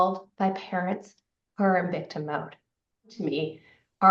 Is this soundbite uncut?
no; 1 cut; at 3.2 s

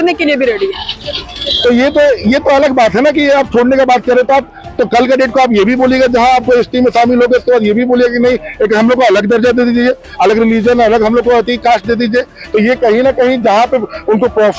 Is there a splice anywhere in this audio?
no; 0 cuts

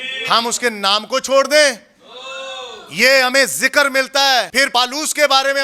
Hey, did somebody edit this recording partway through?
yes; 1 cut; at 4.6 s

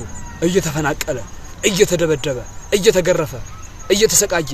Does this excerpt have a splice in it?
no; 0 cuts

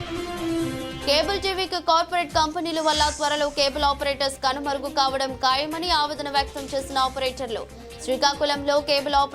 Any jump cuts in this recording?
yes; 1 cut; at 1.0 s

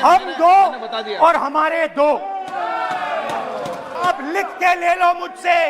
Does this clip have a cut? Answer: yes; 1 cut; at 4.1 s

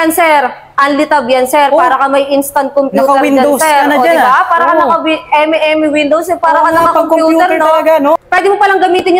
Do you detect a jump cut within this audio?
yes; 1 cut; at 8.2 s

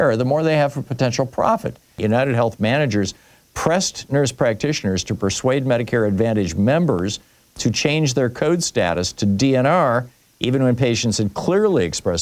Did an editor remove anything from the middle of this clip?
yes; 1 cut; at 2.0 s

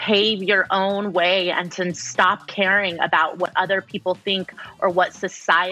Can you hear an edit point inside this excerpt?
no; 0 cuts

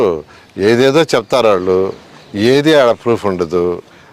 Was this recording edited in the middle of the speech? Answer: no; 0 cuts

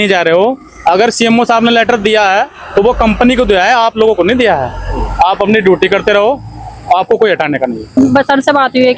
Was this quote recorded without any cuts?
no; 1 cut; at 7.9 s

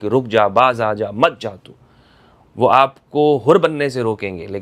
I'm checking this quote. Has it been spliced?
no; 0 cuts

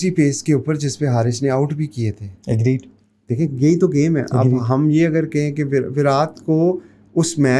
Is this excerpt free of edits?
yes; 0 cuts

